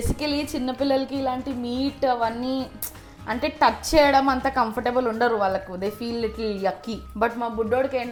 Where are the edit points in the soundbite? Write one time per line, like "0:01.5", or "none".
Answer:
none